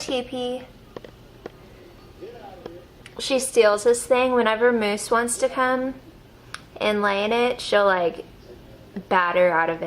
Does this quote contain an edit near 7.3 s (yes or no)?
yes